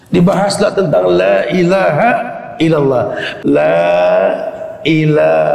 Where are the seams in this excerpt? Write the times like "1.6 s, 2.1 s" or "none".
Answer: 3.4 s